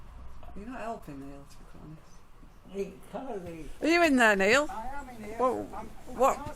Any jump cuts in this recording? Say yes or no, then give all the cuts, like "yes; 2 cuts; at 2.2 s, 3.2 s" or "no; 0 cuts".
yes; 1 cut; at 3.7 s